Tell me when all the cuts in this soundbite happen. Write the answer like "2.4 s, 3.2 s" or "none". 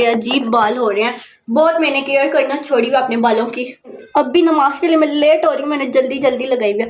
4.0 s